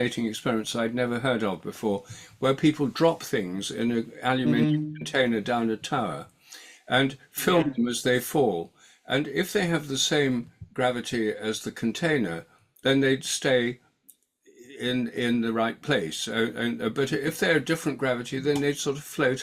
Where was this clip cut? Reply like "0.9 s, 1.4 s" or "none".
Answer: none

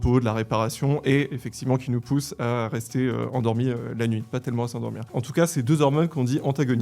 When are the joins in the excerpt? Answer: 5.1 s

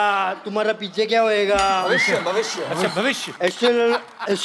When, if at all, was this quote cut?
3.4 s

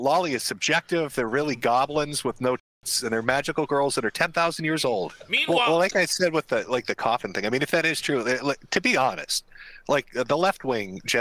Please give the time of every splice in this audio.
5.2 s

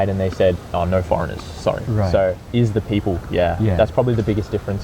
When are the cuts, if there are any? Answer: 2.4 s

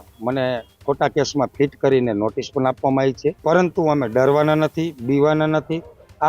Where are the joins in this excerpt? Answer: 3.4 s

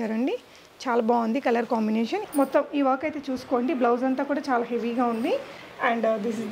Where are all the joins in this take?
2.2 s, 5.6 s

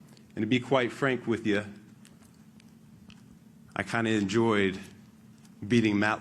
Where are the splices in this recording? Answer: none

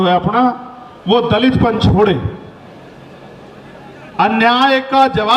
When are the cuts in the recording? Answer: none

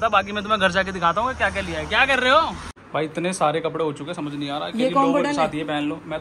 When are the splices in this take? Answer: 2.9 s

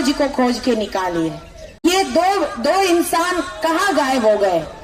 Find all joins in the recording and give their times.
1.9 s

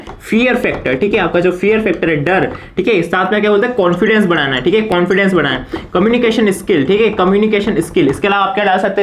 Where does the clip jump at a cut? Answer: none

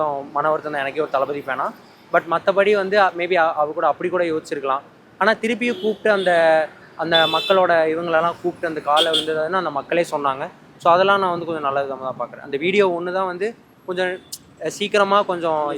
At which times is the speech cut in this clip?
none

